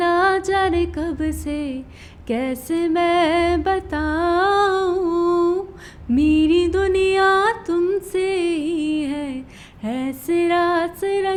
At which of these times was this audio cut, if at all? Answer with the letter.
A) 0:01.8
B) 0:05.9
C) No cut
C